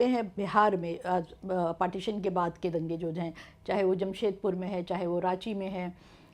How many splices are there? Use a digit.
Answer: 0